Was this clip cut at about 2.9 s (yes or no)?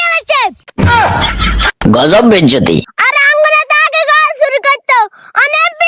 yes